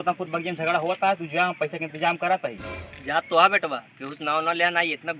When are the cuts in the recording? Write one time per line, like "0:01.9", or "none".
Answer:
none

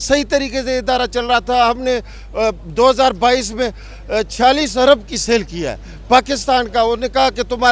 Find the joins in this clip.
none

